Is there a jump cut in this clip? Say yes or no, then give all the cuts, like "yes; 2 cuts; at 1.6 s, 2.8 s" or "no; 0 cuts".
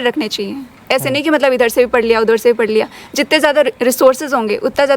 no; 0 cuts